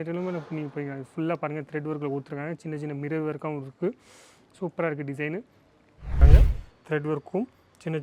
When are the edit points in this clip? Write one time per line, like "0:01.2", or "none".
0:06.2